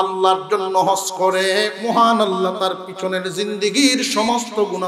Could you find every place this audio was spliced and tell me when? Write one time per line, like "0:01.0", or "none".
0:01.8